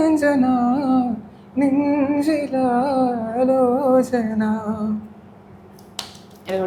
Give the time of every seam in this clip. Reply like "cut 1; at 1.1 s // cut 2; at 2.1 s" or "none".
none

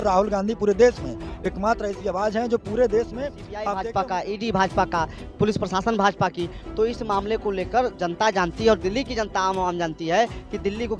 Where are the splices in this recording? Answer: cut 1; at 3.5 s

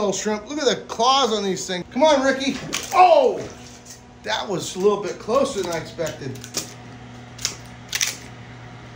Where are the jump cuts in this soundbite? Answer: cut 1; at 1.8 s // cut 2; at 6.5 s

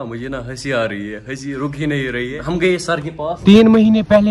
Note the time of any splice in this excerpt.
cut 1; at 2.4 s // cut 2; at 3.3 s

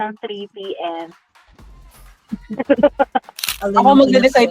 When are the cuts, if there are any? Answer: cut 1; at 3.5 s

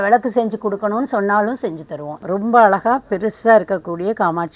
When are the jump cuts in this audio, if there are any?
cut 1; at 2.2 s

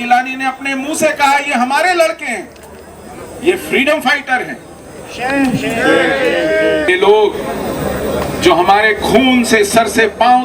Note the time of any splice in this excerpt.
cut 1; at 6.9 s

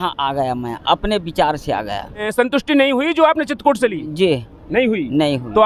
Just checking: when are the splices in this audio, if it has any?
cut 1; at 2.3 s

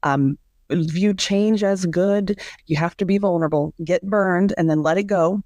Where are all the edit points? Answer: cut 1; at 2.5 s

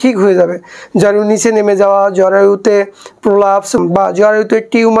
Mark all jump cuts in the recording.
cut 1; at 3.8 s

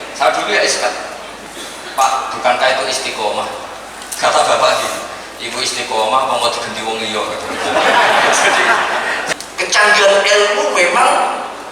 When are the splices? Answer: cut 1; at 9.2 s

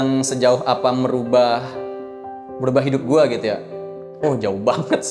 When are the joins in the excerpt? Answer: none

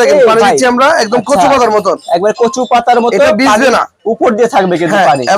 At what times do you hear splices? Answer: none

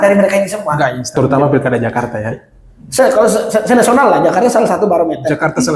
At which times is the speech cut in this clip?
cut 1; at 1.2 s

